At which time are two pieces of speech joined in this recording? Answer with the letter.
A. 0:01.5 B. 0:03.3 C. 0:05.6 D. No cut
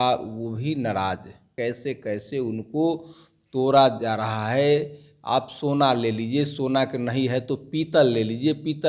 A